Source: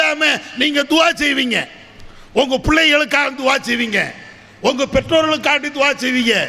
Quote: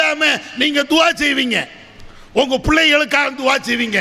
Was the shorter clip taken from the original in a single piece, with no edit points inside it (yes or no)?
yes